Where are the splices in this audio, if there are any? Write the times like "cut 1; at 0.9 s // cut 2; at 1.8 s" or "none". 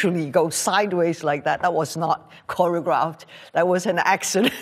none